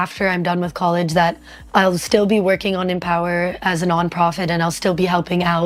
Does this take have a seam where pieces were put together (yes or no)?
no